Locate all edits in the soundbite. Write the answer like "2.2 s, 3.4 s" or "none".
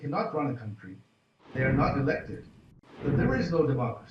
1.5 s, 2.9 s